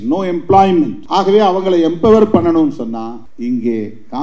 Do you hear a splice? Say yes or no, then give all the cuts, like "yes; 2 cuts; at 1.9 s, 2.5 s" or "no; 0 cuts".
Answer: yes; 2 cuts; at 1.0 s, 3.2 s